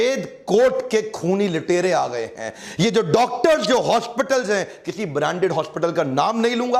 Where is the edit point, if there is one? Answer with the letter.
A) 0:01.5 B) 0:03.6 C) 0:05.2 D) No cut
D